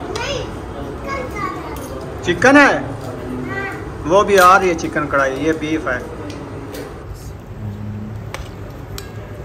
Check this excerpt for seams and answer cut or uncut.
uncut